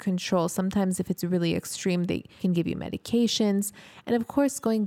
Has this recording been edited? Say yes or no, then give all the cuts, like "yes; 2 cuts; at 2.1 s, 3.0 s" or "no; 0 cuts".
yes; 1 cut; at 2.3 s